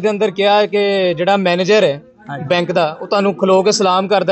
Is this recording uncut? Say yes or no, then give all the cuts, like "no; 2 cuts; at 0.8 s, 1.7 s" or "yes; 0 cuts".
yes; 0 cuts